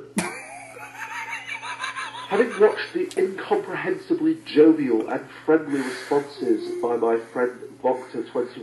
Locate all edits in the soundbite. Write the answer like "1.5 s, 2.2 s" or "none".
7.3 s